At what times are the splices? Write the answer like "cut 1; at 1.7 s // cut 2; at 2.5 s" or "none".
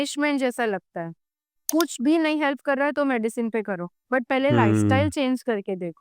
cut 1; at 1.6 s